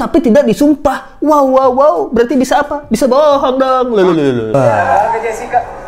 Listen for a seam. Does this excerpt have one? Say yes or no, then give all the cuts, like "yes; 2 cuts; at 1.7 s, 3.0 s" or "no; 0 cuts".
yes; 1 cut; at 4.5 s